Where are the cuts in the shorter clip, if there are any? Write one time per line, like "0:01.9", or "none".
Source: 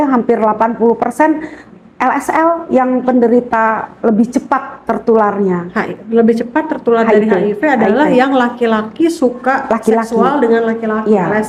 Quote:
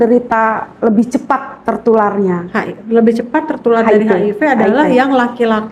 none